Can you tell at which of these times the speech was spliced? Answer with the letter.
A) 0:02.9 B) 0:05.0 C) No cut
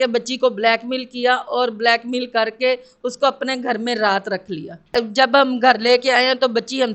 B